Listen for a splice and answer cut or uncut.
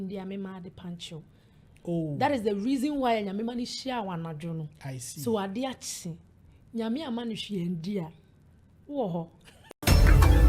cut